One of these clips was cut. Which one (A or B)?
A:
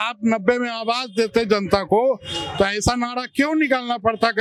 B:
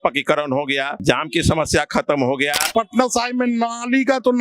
B